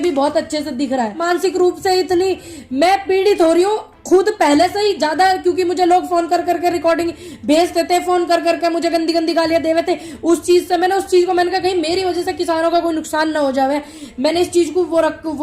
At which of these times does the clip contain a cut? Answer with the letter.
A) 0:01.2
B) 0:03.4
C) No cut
A